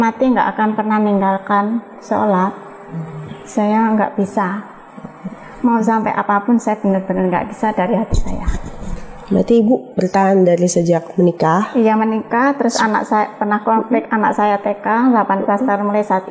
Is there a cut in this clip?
no; 0 cuts

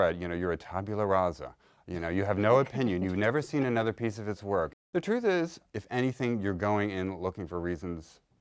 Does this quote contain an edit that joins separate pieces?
yes; 1 cut; at 5.6 s

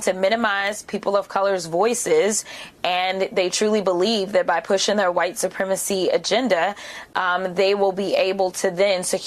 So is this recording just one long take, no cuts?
yes; 0 cuts

